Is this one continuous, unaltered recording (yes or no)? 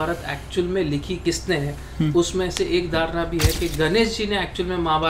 no